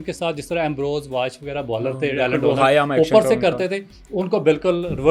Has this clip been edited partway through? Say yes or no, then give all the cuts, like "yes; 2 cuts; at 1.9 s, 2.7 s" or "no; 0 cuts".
no; 0 cuts